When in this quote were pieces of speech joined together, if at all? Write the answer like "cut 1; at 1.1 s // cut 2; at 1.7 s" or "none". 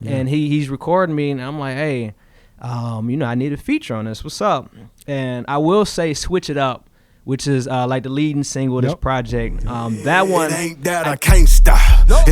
cut 1; at 10.5 s